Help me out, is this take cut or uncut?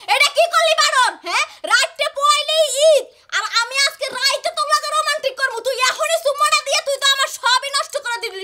uncut